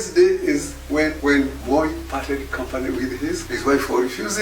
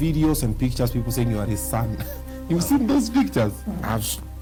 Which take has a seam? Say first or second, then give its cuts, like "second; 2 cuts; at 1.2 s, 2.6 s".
first; 2 cuts; at 1.4 s, 3.5 s